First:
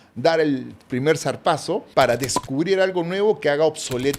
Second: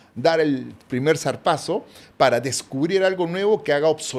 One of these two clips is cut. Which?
first; 1 cut; at 1.9 s

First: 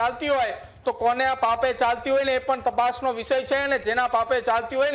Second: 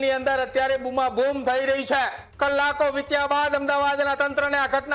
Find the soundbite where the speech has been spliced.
second; 1 cut; at 2.2 s

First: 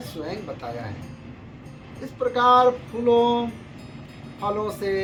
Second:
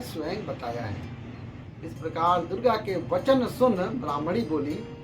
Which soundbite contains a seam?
second; 1 cut; at 1.6 s

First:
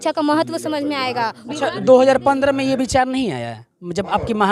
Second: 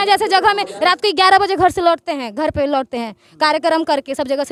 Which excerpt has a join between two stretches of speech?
first; 1 cut; at 1.4 s

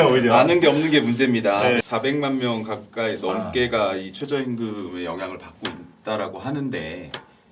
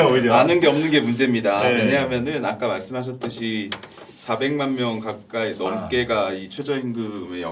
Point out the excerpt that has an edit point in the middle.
first; 1 cut; at 1.8 s

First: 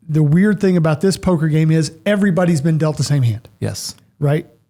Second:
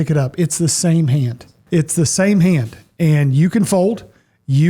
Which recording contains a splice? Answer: second; 1 cut; at 1.5 s

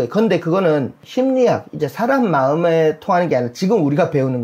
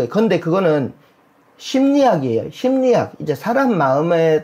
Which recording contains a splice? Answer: first; 1 cut; at 1.0 s

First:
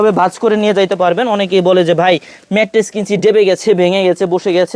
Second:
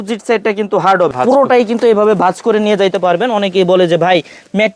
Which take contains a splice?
second; 1 cut; at 1.1 s

